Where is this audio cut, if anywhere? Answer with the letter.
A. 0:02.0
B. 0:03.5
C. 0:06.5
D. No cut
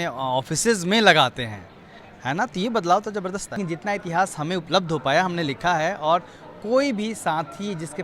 B